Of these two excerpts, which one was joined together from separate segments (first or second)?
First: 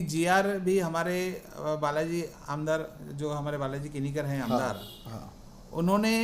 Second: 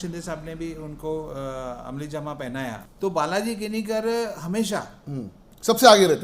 second